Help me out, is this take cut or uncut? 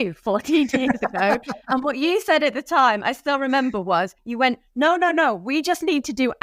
uncut